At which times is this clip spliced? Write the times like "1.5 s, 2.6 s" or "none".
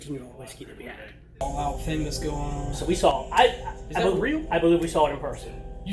1.4 s